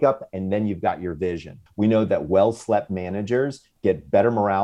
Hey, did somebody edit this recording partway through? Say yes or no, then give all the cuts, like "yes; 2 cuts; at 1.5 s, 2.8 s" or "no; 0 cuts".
yes; 2 cuts; at 1.6 s, 3.7 s